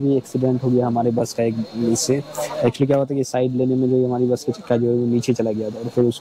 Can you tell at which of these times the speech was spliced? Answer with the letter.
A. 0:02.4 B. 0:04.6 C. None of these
C